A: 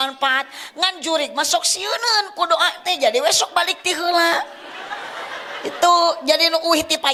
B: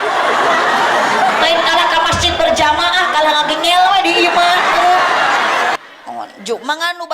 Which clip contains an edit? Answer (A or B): B